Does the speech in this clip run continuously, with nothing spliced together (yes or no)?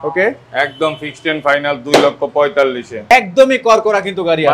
no